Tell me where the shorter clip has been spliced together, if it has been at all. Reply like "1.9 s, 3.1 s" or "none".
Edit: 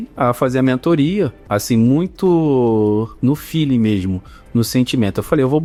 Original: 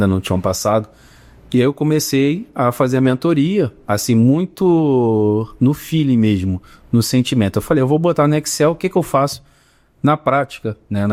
none